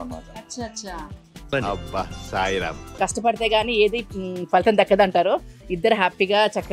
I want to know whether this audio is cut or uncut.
cut